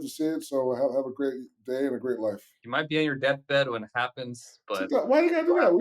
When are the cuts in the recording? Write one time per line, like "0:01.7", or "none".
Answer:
0:02.5